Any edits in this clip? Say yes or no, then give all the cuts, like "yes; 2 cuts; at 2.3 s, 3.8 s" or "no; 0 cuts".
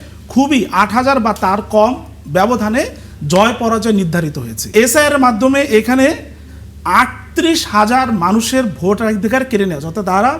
yes; 1 cut; at 4.6 s